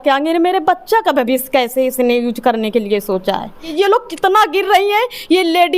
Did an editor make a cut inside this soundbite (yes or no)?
yes